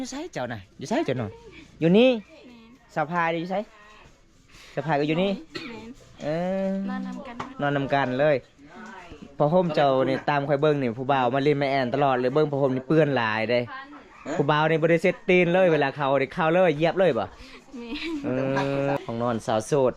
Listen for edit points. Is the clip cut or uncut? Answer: cut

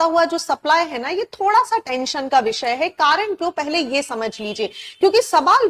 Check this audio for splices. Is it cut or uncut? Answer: uncut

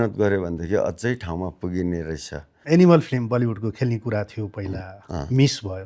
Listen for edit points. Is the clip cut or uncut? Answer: cut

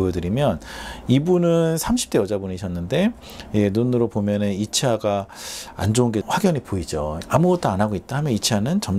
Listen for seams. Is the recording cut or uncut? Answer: uncut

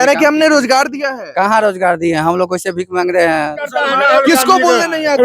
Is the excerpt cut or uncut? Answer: cut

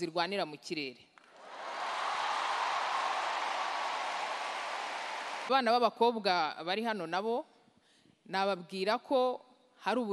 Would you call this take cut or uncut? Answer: cut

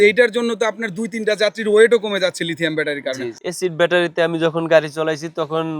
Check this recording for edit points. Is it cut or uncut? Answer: cut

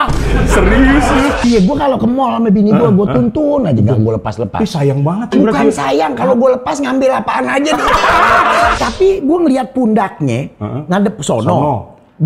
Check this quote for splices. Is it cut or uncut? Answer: cut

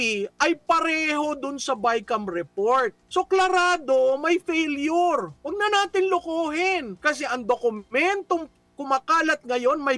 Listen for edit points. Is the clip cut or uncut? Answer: cut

